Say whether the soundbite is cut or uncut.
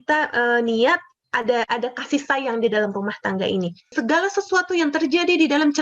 cut